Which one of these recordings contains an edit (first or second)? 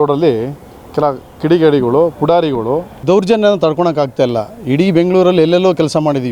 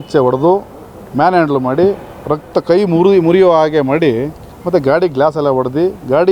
first